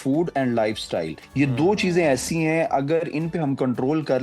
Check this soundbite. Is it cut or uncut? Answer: cut